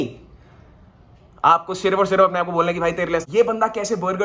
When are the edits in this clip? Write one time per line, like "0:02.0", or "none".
0:03.2